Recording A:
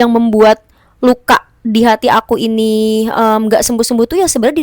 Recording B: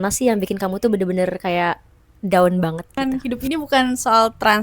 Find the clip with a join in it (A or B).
B